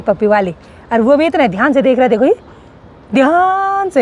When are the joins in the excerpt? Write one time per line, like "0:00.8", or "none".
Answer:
none